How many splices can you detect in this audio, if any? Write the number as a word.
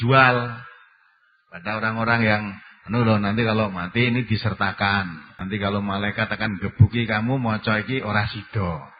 one